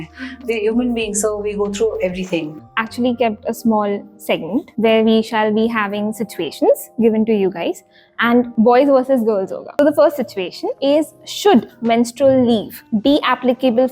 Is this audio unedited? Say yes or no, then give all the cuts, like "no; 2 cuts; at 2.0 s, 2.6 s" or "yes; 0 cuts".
no; 6 cuts; at 2.5 s, 4.7 s, 8.5 s, 9.8 s, 10.6 s, 12.8 s